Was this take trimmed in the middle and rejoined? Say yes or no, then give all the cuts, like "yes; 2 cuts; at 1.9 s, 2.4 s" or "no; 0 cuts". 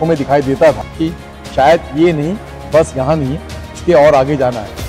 yes; 1 cut; at 1.1 s